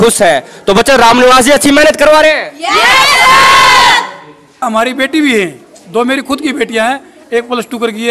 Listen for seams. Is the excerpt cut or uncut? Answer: cut